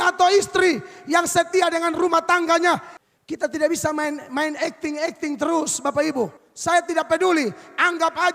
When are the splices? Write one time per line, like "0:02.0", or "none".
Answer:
0:02.9
0:06.5